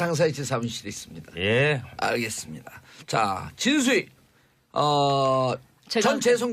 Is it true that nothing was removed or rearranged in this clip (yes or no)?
no